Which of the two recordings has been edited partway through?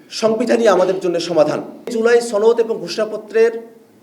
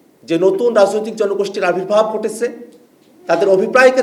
first; 1 cut; at 1.9 s

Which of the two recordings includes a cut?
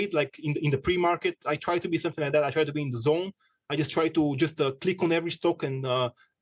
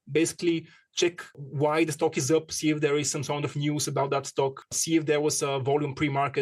second; 2 cuts; at 1.4 s, 4.8 s

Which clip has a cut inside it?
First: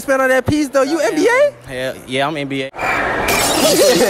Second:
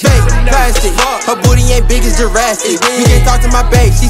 first; 1 cut; at 2.8 s

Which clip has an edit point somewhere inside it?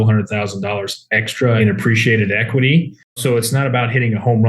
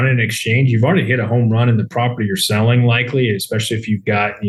first; 2 cuts; at 1.6 s, 3.2 s

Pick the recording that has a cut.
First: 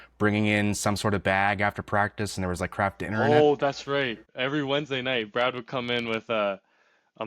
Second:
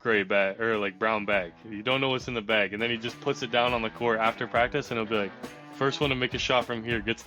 first; 1 cut; at 4.3 s

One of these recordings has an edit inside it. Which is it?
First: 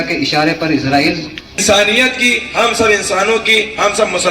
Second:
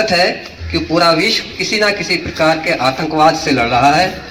first; 1 cut; at 1.6 s

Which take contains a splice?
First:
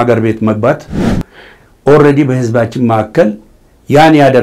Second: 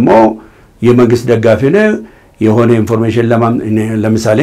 first; 1 cut; at 1.2 s

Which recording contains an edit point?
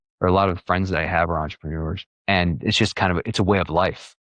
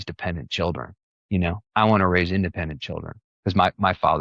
first; 1 cut; at 2.1 s

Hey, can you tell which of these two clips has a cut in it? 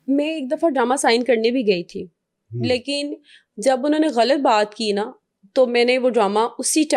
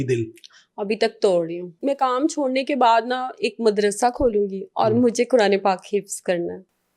second; 1 cut; at 1.6 s

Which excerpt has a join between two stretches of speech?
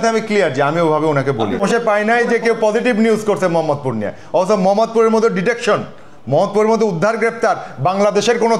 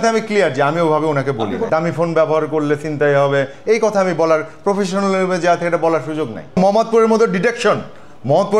second; 2 cuts; at 1.6 s, 6.6 s

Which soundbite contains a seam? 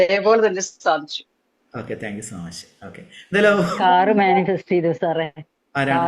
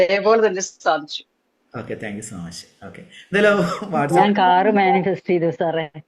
first; 1 cut; at 3.8 s

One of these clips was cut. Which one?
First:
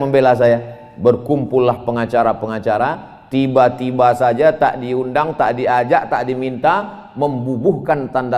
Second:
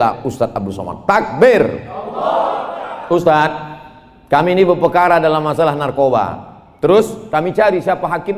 second; 1 cut; at 2.8 s

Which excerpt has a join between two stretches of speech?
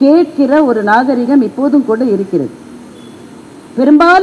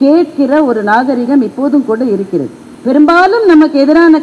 second; 1 cut; at 2.6 s

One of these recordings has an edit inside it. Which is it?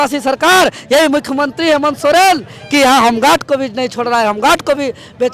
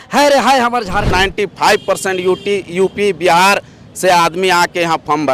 second; 1 cut; at 1.1 s

